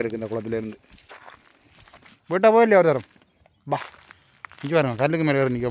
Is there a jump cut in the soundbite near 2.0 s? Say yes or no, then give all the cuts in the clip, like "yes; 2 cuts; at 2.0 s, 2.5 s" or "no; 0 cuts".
yes; 1 cut; at 2.0 s